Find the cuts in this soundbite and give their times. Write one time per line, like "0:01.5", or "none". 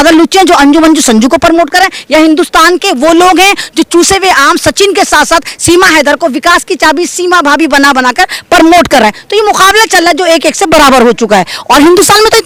none